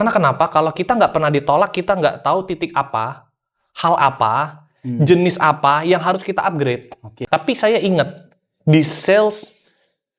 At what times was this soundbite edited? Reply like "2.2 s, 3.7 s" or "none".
7.1 s

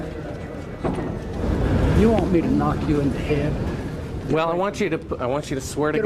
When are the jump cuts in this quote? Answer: 1.4 s

